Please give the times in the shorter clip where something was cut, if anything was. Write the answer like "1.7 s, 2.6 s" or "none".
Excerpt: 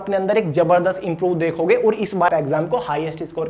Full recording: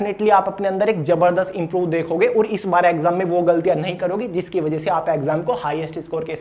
2.3 s